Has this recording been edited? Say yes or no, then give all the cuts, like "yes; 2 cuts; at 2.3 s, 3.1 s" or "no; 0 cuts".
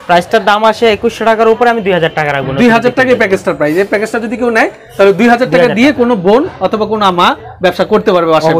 no; 0 cuts